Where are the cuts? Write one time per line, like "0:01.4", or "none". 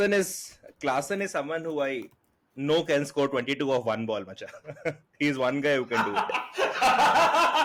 none